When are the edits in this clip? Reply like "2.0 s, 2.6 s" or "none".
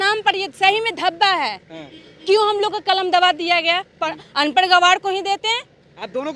none